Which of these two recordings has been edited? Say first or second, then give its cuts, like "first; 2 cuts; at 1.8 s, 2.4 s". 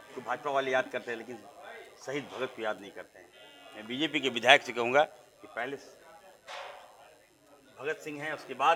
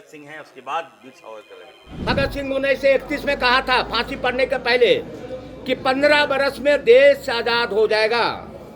second; 1 cut; at 2.0 s